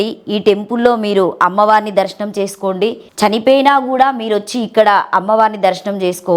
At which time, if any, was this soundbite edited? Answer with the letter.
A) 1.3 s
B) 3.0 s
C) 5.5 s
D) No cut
B